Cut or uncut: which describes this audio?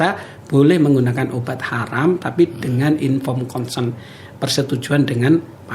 uncut